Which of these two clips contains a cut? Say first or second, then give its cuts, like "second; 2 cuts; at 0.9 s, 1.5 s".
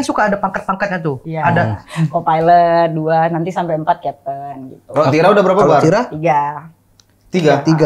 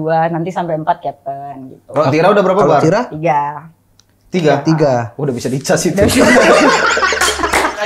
first; 1 cut; at 1.8 s